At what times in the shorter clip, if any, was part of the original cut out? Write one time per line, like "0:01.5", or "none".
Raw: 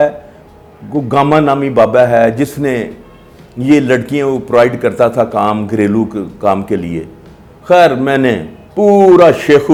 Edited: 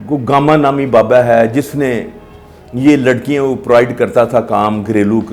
none